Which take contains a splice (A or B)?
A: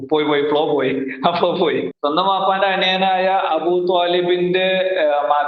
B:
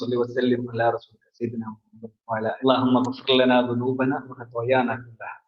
A